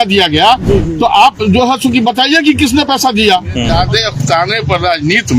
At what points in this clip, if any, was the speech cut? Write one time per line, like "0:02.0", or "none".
0:03.7